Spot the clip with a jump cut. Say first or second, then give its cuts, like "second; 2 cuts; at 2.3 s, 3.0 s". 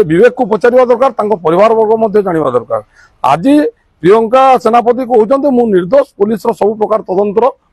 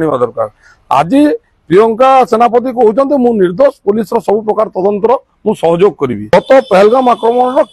second; 1 cut; at 6.3 s